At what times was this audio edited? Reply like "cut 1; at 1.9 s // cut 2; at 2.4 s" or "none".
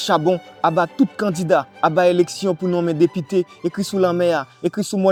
none